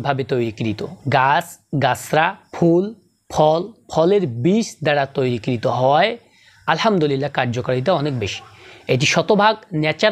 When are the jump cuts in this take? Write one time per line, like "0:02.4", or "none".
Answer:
0:00.9
0:02.4